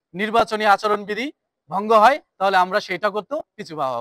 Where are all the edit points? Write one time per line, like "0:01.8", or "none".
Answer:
none